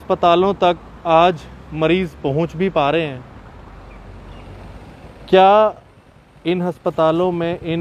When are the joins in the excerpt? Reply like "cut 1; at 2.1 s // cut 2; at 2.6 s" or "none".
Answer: none